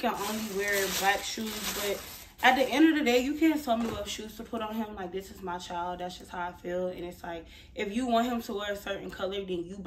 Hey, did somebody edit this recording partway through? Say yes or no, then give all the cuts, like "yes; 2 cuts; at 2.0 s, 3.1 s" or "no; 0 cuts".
no; 0 cuts